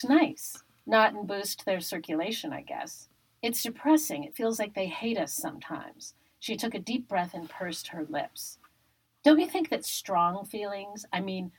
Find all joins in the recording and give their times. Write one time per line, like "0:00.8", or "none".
none